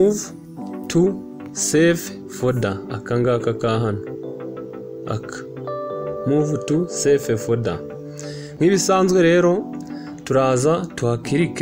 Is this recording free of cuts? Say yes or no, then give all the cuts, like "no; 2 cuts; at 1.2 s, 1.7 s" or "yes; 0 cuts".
yes; 0 cuts